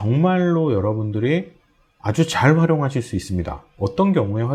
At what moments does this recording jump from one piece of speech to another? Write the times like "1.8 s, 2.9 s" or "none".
none